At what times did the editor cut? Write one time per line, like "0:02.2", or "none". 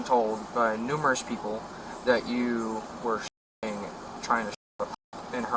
none